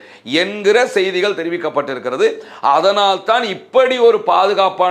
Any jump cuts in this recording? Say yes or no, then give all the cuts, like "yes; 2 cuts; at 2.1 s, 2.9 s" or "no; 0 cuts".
no; 0 cuts